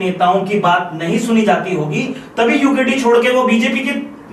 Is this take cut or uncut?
uncut